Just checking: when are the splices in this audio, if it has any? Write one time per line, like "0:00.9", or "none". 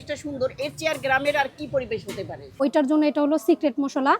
0:02.5

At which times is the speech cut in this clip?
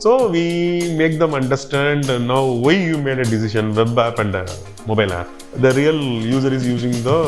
0:05.5

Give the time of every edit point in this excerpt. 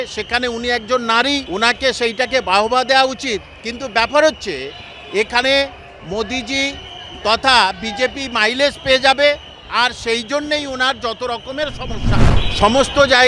0:01.4
0:12.4

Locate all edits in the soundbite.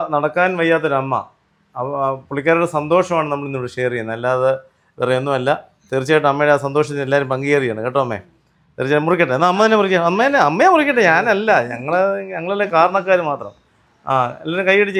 none

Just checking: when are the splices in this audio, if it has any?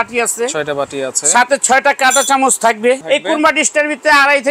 0:03.0

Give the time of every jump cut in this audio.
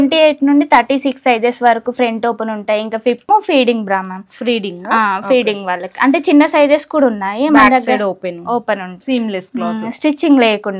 0:03.3
0:08.9

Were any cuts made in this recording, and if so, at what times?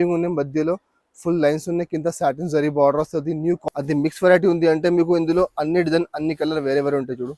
0:03.6

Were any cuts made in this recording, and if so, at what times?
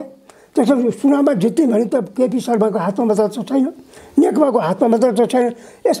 none

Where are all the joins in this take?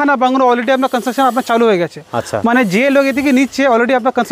none

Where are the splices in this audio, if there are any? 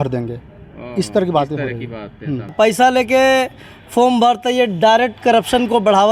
0:02.5

